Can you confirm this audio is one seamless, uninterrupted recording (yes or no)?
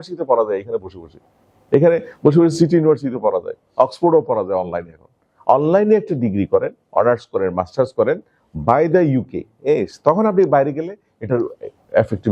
yes